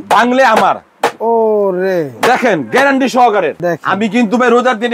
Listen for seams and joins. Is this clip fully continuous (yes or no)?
yes